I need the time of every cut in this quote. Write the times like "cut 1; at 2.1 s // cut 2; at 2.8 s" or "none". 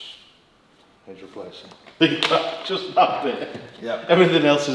cut 1; at 1.9 s